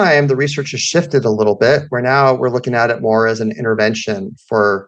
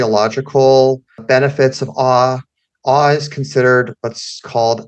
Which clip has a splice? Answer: second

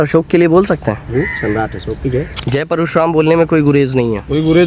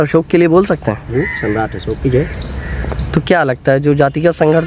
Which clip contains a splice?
first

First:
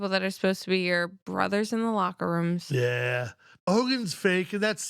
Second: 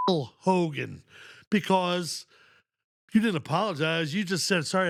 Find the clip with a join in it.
first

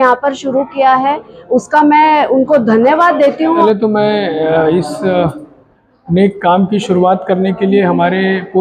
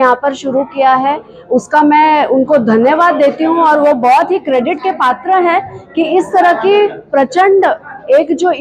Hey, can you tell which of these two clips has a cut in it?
first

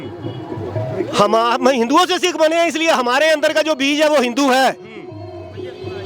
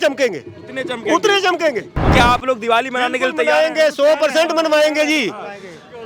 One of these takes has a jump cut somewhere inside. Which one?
second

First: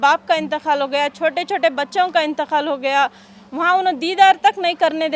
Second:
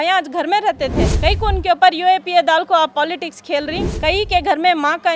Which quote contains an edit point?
second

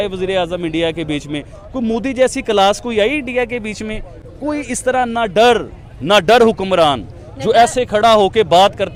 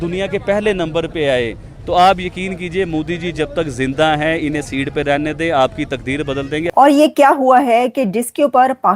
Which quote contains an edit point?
second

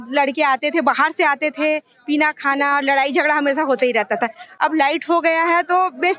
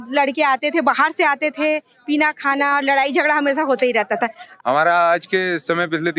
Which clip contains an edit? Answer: second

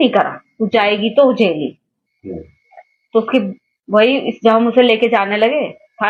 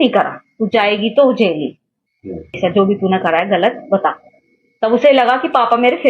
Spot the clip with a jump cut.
second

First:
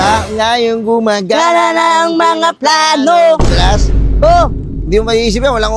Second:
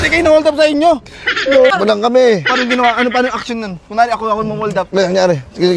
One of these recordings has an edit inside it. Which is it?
second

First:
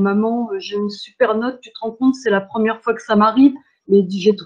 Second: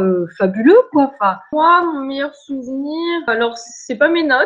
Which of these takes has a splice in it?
second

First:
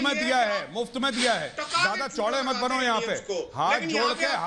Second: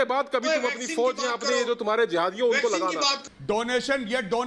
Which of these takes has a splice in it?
second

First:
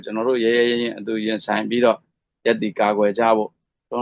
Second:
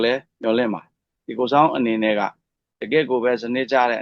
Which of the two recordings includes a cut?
second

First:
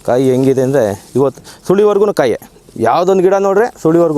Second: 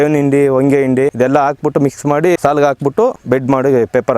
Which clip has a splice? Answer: second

